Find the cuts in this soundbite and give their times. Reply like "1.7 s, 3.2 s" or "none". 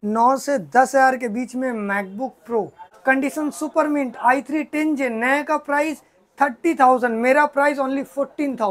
2.8 s